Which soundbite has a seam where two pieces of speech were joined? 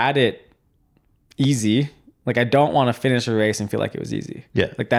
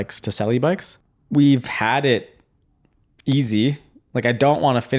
second; 1 cut; at 0.9 s

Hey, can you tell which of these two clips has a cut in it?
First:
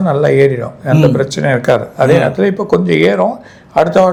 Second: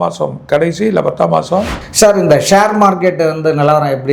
second; 1 cut; at 1.8 s

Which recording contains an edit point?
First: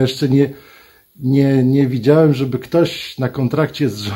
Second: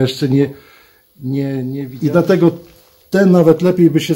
second; 1 cut; at 1.9 s

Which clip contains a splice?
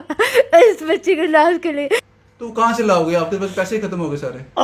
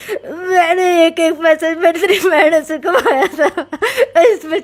first; 1 cut; at 2.2 s

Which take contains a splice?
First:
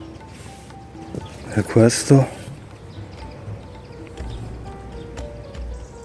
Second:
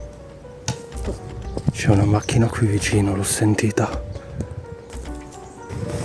second; 1 cut; at 4.9 s

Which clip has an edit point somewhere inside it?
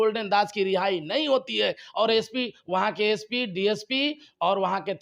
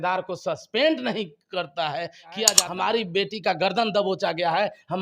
second; 1 cut; at 2.5 s

